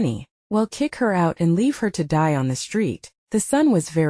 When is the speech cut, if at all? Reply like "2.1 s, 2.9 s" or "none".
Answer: 3.1 s